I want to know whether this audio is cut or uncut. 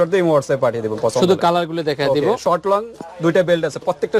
uncut